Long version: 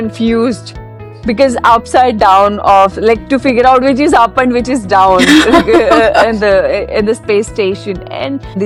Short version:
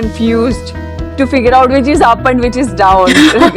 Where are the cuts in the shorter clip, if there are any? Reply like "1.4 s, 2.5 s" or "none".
1.1 s